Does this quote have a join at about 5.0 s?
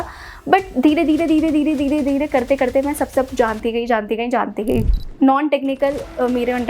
yes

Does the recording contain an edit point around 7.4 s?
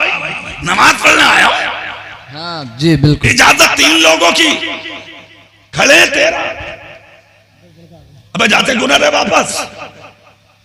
no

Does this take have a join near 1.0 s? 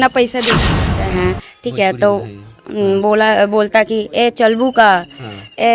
yes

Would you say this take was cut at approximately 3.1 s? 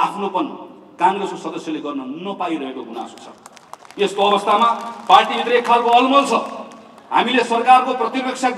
no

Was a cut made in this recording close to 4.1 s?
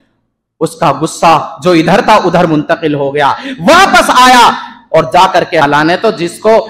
no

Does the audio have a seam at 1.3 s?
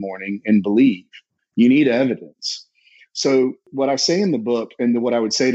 no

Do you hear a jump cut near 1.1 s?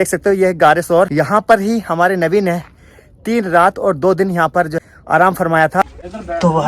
yes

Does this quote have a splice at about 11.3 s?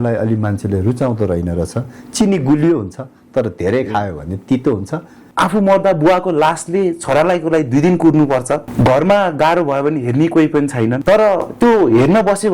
no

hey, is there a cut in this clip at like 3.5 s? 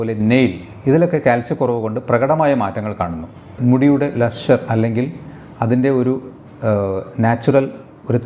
yes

